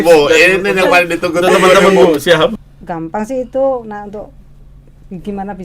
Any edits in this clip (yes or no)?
yes